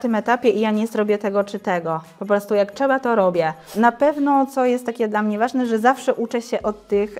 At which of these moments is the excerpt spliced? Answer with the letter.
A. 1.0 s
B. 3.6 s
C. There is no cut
B